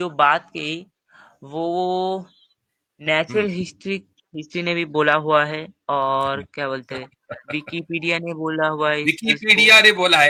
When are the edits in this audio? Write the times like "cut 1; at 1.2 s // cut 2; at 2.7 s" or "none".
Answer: none